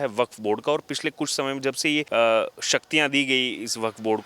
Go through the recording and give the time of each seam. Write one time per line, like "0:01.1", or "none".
0:02.1